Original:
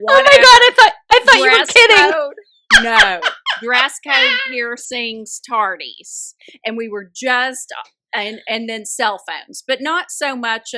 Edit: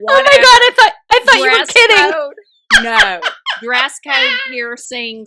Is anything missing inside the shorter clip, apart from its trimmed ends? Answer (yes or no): no